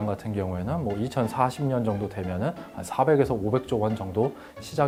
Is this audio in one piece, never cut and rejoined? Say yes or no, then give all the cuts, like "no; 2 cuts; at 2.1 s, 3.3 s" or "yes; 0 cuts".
yes; 0 cuts